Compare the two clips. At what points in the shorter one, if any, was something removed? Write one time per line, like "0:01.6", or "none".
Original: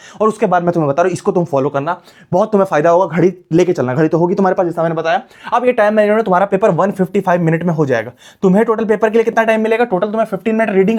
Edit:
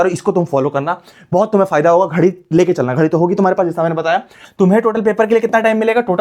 0:04.4